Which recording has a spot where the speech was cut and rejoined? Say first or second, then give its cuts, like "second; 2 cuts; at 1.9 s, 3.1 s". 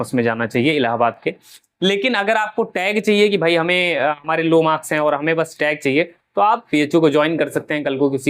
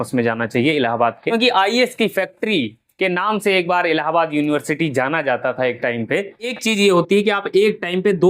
second; 2 cuts; at 1.7 s, 6.6 s